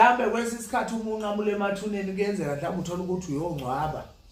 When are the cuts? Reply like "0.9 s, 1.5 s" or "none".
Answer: none